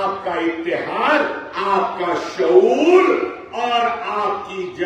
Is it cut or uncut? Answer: uncut